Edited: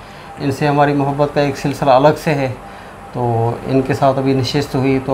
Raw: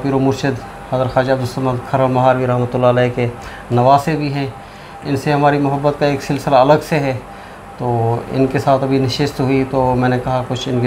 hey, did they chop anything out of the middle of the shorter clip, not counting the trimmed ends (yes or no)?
no